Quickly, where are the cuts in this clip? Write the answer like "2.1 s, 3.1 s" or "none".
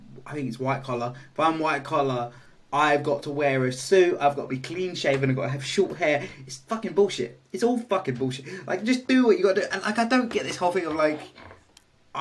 none